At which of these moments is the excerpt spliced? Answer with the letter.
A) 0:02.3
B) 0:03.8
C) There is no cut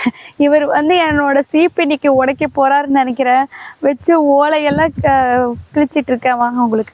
C